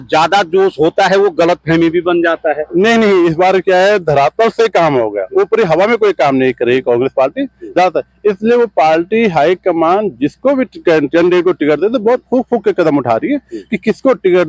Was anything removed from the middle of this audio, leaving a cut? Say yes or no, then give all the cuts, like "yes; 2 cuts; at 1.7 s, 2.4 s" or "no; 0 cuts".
no; 0 cuts